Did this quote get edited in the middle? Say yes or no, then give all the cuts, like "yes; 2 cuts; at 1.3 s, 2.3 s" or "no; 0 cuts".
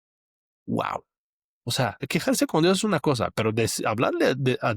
yes; 1 cut; at 2.0 s